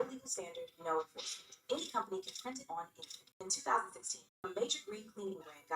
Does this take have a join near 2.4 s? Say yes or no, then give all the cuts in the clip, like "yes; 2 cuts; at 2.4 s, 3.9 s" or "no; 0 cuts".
yes; 1 cut; at 2.4 s